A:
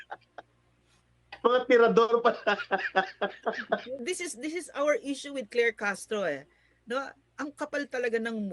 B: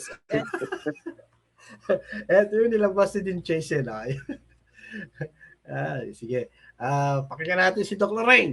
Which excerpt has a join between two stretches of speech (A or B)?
A